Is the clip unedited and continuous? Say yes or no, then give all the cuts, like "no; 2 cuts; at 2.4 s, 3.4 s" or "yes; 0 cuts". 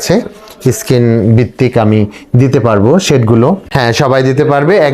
no; 1 cut; at 3.7 s